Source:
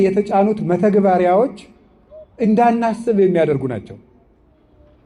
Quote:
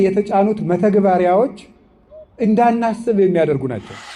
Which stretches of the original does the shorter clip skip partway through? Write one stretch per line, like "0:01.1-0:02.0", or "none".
none